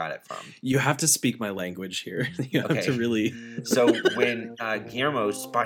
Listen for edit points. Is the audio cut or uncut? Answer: uncut